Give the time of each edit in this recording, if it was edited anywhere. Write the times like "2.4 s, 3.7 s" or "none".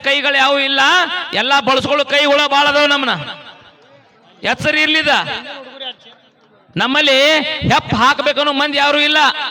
none